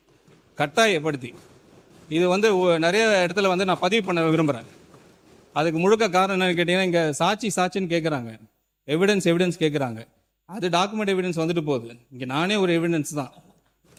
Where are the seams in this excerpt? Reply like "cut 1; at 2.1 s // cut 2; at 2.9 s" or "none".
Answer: none

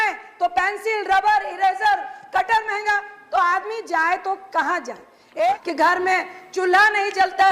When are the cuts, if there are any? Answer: cut 1; at 5.6 s

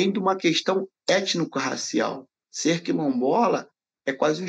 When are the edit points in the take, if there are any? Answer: none

